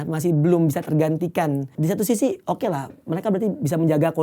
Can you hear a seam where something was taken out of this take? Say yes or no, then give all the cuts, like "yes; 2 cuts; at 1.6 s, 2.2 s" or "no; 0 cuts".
yes; 1 cut; at 1.7 s